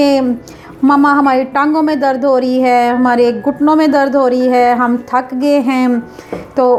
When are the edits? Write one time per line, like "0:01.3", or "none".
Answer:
none

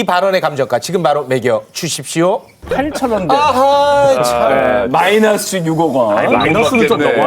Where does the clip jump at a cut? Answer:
0:02.5

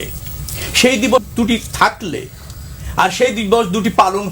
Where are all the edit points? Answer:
0:01.2

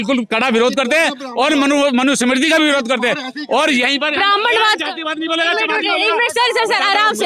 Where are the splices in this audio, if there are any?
none

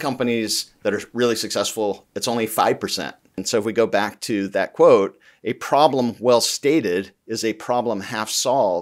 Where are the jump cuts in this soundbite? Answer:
0:03.4

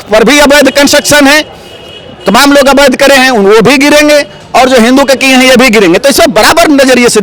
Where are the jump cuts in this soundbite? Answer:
none

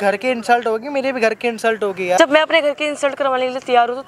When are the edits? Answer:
0:02.2

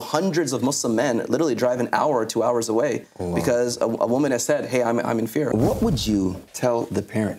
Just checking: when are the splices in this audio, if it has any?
0:05.5
0:06.5

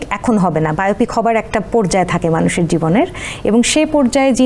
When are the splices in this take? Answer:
none

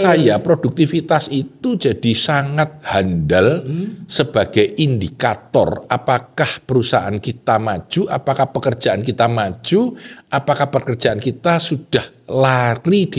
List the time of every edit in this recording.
none

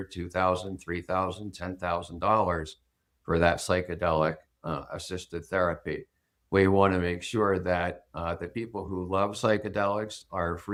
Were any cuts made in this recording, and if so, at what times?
none

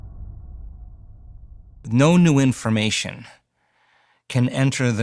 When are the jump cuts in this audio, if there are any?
0:01.8

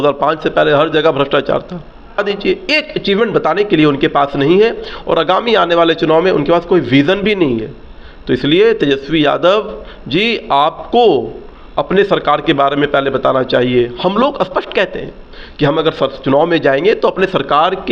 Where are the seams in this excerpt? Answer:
0:02.2

